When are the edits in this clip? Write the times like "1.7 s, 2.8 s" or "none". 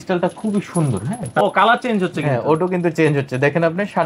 1.3 s